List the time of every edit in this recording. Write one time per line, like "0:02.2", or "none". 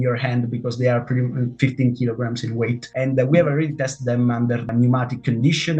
0:02.8
0:04.7